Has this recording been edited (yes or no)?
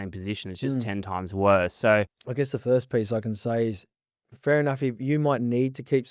yes